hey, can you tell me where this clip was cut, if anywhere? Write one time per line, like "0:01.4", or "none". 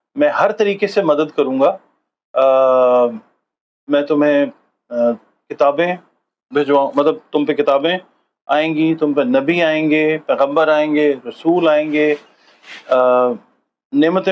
none